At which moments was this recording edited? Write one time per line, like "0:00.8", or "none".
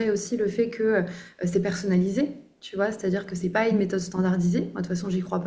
none